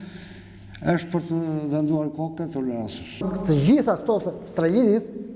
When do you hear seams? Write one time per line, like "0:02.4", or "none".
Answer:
0:03.2

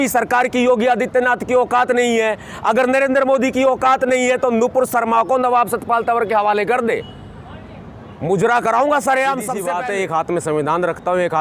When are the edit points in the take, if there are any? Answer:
0:09.7

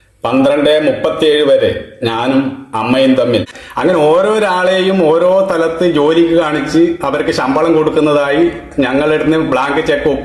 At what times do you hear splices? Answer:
0:03.2

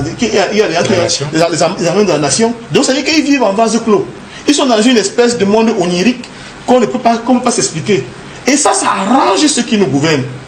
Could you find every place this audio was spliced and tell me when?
none

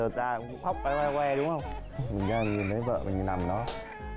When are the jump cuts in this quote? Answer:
none

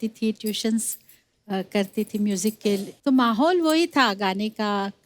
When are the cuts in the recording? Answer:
0:02.9

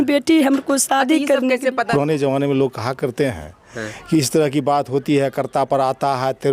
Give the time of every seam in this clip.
0:01.9

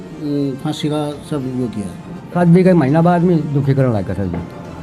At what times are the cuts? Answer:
0:02.3

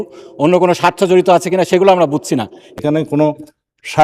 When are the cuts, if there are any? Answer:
0:02.6

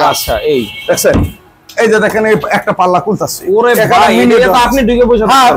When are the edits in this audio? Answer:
none

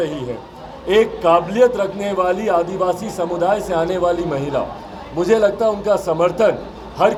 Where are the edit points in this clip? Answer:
none

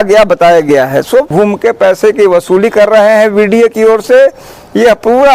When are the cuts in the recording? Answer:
0:01.3

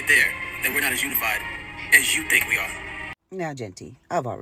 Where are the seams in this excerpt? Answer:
0:03.1

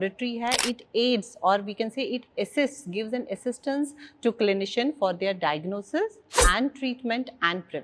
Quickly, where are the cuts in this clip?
none

